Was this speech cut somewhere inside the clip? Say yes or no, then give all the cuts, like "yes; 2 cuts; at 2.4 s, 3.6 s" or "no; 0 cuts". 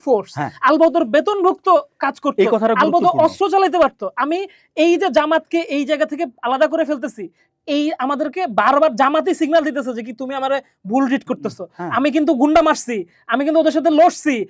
no; 0 cuts